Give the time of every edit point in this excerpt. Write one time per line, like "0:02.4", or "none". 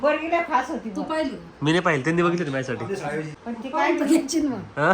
0:03.4